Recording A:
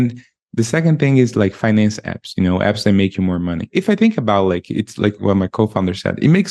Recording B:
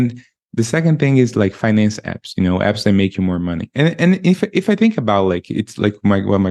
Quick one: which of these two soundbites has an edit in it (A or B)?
A